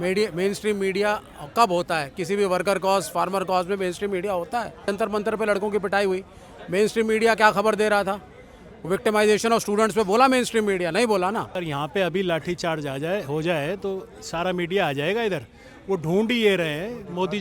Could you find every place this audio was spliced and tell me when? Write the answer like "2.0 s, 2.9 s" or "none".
4.8 s, 11.6 s